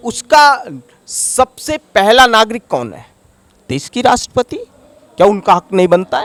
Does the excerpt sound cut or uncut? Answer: uncut